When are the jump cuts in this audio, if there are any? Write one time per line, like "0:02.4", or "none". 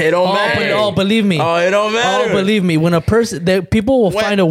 none